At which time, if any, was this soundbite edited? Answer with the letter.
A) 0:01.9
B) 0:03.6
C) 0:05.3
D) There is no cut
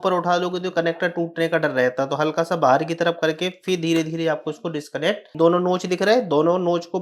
C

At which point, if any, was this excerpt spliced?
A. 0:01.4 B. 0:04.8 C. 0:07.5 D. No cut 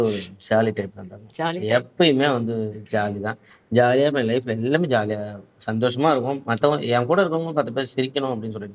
D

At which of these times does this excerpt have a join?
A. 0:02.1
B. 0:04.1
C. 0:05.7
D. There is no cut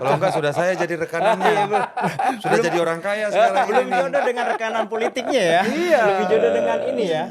D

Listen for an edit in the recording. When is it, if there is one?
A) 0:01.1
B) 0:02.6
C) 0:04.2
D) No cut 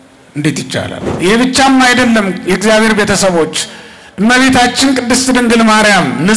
A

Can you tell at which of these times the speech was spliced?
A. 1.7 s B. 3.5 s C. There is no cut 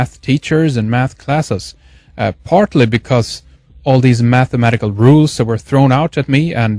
A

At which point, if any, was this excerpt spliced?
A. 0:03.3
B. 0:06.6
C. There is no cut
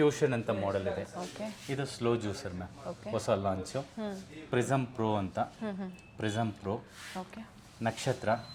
C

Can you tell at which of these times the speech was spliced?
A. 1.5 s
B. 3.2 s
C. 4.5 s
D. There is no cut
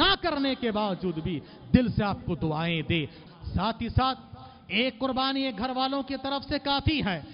B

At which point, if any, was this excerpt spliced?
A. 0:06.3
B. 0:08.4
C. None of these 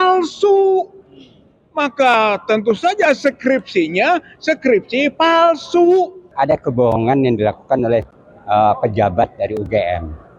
A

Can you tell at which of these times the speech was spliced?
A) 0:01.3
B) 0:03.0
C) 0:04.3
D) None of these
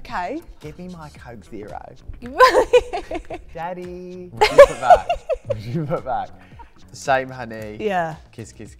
D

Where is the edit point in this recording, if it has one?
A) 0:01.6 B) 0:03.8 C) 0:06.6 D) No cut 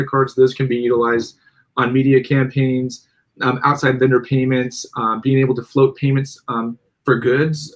D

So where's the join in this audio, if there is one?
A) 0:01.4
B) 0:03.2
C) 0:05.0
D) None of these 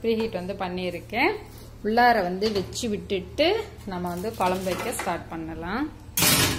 D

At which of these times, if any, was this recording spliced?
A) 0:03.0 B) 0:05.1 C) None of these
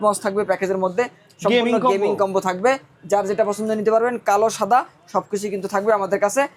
C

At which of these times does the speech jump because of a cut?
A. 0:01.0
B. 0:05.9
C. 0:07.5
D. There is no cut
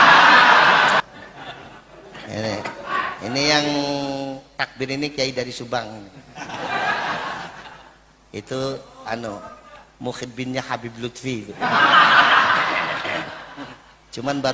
A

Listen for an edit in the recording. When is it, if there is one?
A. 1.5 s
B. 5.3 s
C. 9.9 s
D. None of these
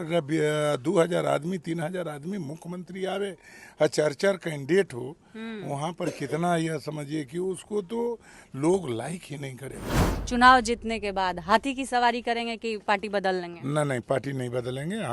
C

